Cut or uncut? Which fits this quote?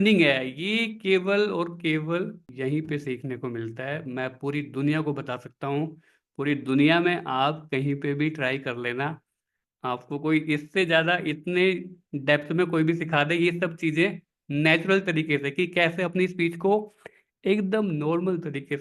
cut